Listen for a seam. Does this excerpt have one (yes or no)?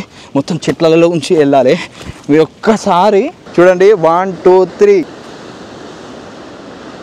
yes